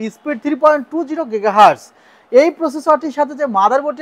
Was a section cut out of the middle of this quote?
no; 0 cuts

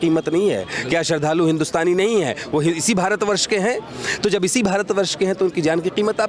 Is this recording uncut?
yes; 0 cuts

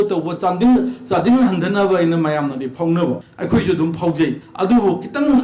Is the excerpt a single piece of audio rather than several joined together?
no; 2 cuts; at 3.3 s, 4.4 s

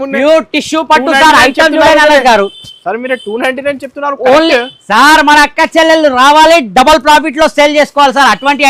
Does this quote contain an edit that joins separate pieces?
no; 0 cuts

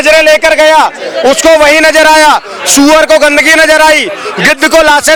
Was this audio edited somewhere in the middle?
no; 0 cuts

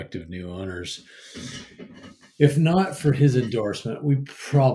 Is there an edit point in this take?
no; 0 cuts

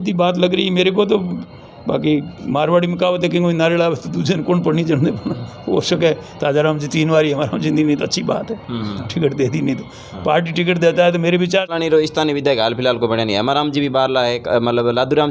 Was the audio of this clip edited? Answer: yes; 1 cut; at 11.7 s

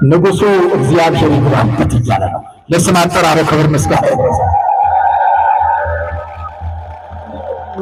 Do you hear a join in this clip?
no; 0 cuts

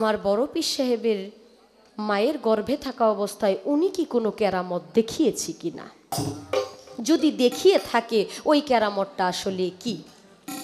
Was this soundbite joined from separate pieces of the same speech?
no; 0 cuts

